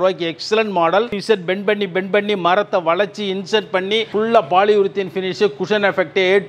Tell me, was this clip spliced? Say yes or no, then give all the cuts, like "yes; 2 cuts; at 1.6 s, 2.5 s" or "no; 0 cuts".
yes; 1 cut; at 1.2 s